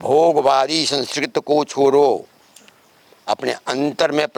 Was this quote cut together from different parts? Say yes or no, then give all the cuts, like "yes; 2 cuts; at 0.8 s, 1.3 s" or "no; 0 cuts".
no; 0 cuts